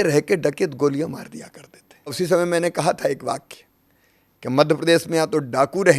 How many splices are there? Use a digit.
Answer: 1